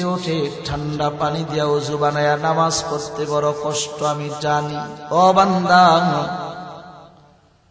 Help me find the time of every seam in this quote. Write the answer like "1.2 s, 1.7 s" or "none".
5.0 s